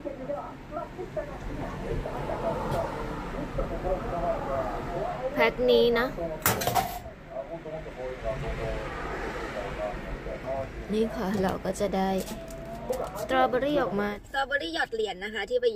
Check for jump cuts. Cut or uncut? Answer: cut